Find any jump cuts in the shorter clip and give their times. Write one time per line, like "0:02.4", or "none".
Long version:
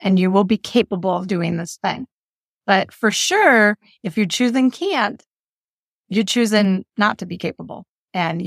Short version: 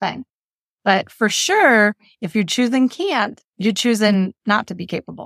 0:03.4